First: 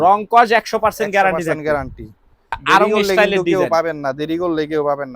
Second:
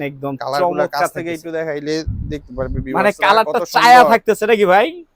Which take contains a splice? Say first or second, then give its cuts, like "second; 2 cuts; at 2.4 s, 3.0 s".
first; 1 cut; at 2.6 s